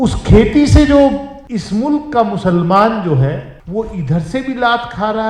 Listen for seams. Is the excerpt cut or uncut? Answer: cut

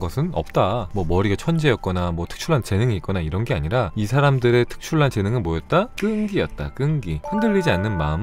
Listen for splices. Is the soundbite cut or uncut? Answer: cut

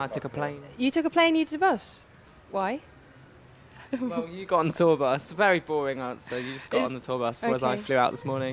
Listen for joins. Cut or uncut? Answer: uncut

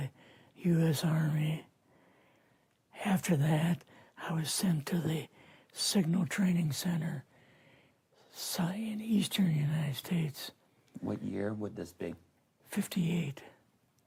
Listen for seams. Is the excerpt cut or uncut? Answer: uncut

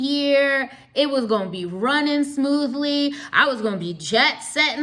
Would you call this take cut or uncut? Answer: uncut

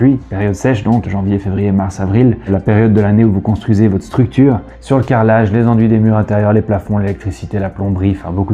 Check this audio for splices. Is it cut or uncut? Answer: cut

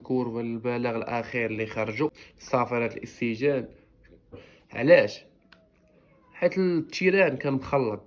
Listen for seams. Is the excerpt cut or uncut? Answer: cut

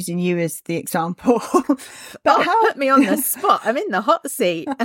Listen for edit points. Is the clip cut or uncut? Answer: uncut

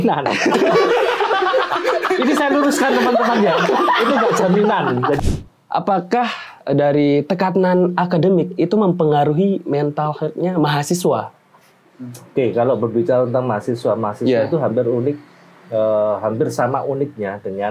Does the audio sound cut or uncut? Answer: cut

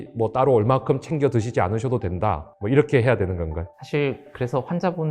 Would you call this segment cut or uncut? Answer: cut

